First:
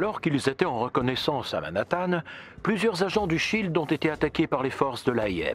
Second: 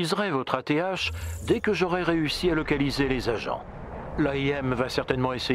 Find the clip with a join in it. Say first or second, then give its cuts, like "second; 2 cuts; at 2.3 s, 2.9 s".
first; 1 cut; at 1.5 s